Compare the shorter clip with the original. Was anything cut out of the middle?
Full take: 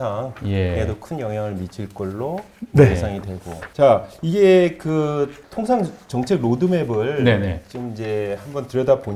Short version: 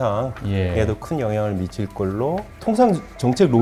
yes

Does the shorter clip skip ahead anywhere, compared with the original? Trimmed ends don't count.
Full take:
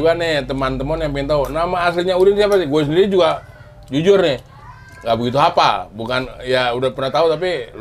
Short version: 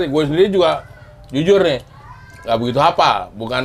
no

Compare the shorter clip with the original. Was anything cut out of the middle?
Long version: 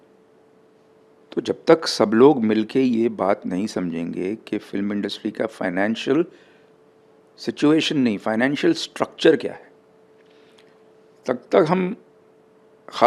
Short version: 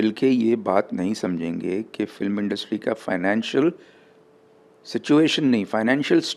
no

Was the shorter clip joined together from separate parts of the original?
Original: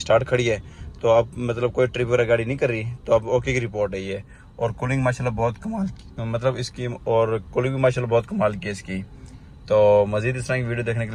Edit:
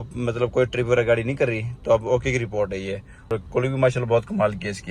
yes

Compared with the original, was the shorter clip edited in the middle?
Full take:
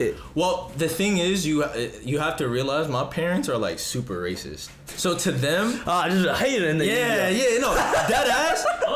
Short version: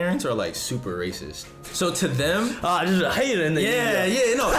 no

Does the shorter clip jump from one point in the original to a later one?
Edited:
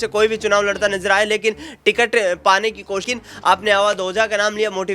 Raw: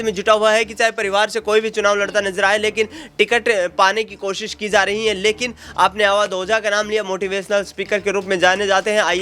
yes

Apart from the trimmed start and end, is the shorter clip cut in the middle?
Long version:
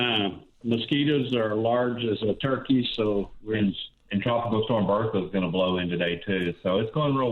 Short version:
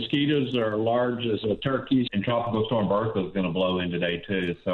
yes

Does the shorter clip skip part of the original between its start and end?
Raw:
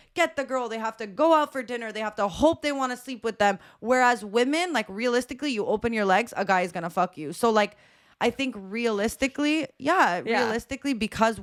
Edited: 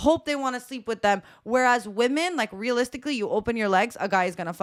no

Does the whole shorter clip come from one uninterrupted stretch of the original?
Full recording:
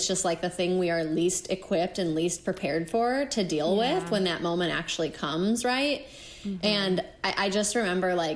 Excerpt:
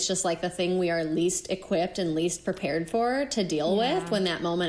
yes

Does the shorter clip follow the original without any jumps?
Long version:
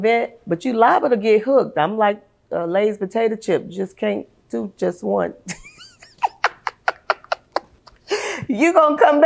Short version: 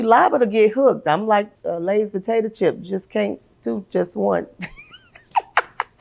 no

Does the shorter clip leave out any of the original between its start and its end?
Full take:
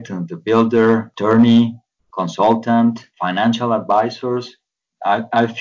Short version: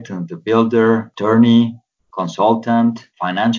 no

